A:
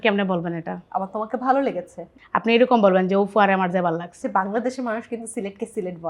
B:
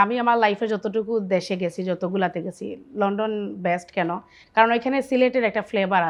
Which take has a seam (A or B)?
A